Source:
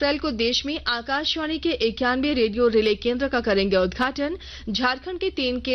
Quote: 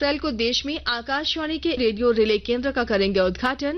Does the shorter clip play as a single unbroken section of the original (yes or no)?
no